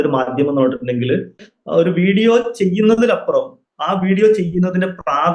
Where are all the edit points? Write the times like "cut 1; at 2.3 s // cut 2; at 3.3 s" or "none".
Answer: cut 1; at 1.4 s